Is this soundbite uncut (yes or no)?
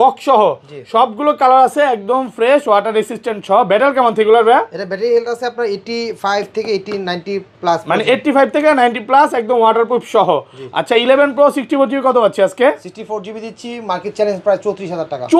yes